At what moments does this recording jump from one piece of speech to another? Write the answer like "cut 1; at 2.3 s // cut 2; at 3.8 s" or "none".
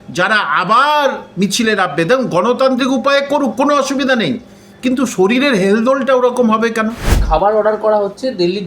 cut 1; at 7.2 s